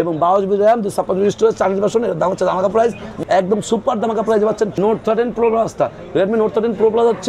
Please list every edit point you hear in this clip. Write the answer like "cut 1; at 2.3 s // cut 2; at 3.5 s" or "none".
cut 1; at 3.1 s // cut 2; at 4.7 s

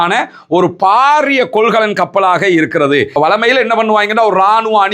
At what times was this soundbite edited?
cut 1; at 3.1 s

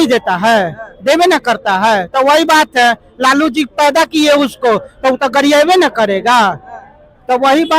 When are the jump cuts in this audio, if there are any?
none

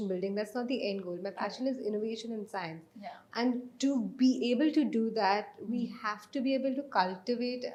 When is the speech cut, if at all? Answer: none

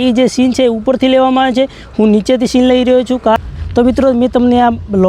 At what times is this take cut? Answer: cut 1; at 3.4 s

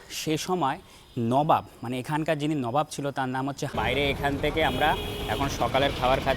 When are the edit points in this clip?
cut 1; at 3.7 s

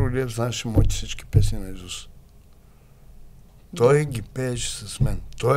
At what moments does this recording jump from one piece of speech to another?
none

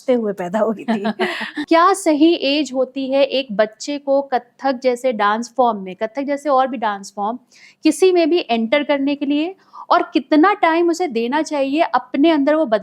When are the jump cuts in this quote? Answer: cut 1; at 1.6 s

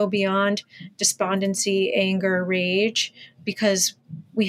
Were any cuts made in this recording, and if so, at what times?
none

